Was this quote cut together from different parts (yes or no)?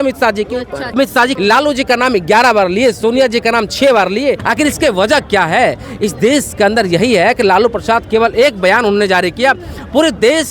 yes